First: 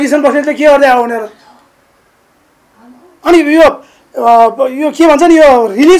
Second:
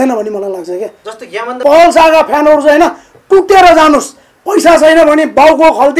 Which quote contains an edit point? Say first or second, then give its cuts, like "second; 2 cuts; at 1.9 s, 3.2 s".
second; 1 cut; at 1.5 s